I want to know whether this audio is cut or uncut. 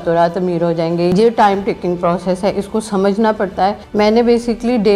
cut